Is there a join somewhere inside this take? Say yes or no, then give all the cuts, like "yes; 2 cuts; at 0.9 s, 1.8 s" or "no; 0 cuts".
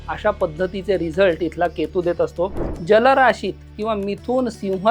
yes; 1 cut; at 2.7 s